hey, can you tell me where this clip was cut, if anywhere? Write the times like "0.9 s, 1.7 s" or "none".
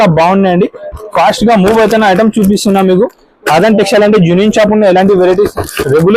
none